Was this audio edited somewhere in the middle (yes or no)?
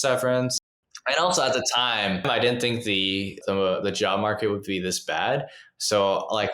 yes